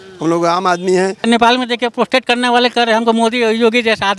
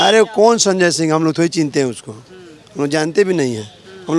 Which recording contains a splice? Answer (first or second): first